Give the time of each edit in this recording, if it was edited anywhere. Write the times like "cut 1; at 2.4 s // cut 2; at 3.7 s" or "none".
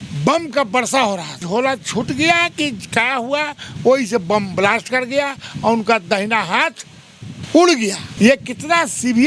cut 1; at 1.4 s // cut 2; at 8.1 s